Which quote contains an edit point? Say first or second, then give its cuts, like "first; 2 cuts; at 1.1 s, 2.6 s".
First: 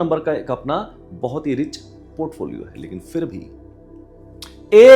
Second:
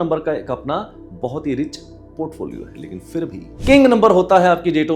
second; 1 cut; at 3.5 s